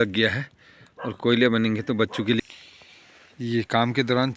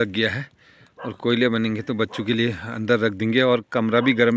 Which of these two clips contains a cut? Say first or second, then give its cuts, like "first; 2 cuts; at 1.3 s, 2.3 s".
first; 1 cut; at 2.4 s